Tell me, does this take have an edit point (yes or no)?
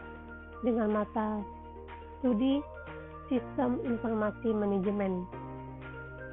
yes